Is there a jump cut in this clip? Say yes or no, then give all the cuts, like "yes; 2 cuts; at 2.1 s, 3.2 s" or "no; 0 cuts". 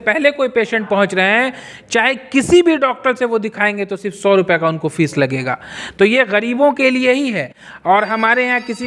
no; 0 cuts